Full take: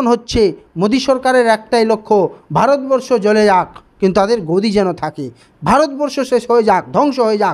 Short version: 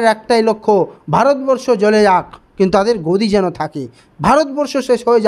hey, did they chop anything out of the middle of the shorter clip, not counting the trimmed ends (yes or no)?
no